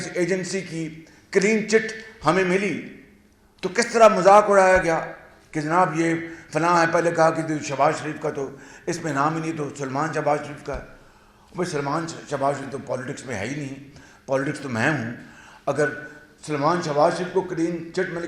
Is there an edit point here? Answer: no; 0 cuts

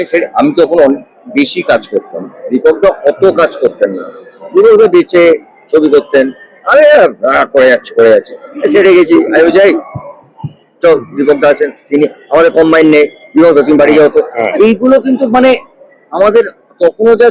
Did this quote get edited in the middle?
no; 0 cuts

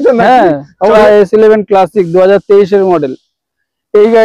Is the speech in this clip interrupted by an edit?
yes; 1 cut; at 1.0 s

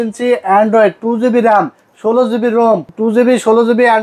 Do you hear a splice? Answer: yes; 1 cut; at 2.9 s

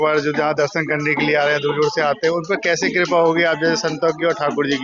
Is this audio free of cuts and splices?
yes; 0 cuts

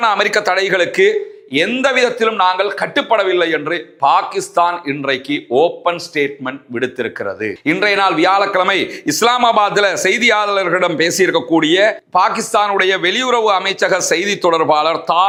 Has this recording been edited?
no; 0 cuts

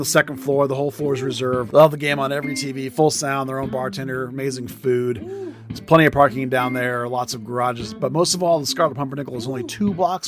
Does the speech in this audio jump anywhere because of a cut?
no; 0 cuts

